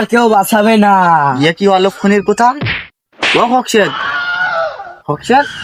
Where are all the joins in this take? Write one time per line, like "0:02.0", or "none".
none